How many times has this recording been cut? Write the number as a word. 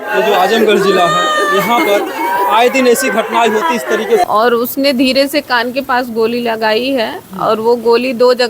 one